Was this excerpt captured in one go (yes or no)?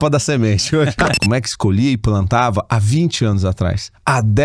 no